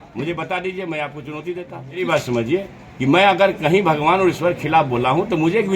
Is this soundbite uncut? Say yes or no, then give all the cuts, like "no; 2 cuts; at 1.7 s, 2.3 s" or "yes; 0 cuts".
no; 1 cut; at 2.0 s